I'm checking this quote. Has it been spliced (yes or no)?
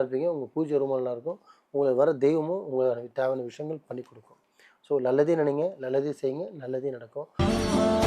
yes